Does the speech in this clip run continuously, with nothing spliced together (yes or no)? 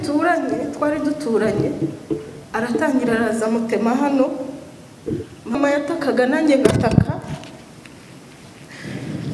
no